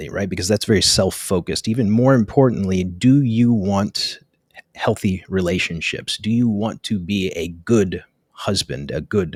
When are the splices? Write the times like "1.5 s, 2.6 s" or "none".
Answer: none